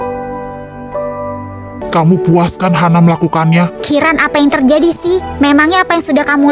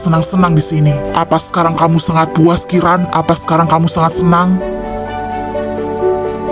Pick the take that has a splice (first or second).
first